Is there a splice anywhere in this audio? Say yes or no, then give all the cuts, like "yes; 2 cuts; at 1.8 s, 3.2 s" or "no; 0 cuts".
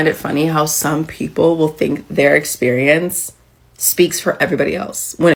no; 0 cuts